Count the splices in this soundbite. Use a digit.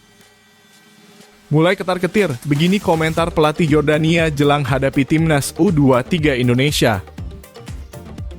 2